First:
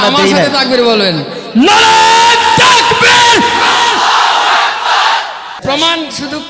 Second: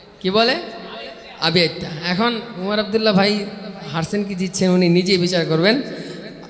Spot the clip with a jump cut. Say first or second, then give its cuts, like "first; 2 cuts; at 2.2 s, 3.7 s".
first; 1 cut; at 5.5 s